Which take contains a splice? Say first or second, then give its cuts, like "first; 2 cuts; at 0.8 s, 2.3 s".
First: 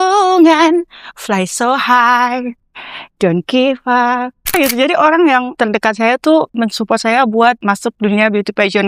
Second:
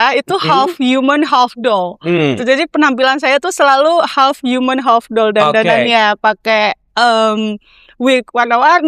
first; 4 cuts; at 4.5 s, 5.5 s, 6.5 s, 7.6 s